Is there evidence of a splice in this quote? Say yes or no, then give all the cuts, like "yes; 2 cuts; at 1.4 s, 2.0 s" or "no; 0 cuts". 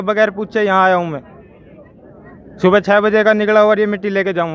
no; 0 cuts